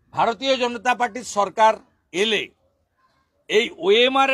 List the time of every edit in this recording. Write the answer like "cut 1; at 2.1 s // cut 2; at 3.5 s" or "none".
none